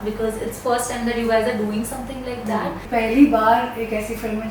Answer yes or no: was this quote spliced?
yes